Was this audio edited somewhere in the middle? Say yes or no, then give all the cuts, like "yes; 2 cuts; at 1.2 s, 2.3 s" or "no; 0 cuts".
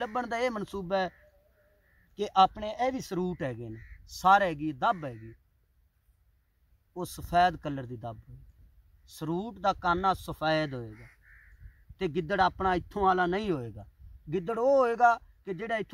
no; 0 cuts